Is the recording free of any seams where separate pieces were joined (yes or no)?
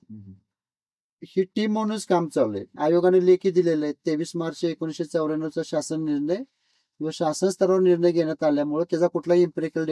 no